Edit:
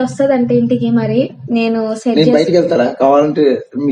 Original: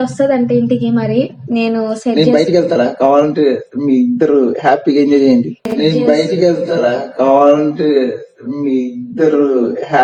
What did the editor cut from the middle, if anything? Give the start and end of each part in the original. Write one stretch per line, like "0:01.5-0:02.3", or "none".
none